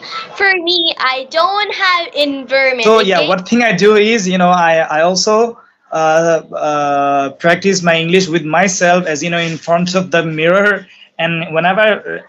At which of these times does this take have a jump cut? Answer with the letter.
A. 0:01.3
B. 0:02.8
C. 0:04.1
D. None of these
B